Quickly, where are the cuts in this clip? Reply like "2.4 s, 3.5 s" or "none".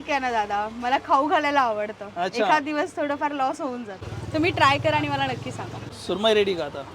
3.9 s, 5.9 s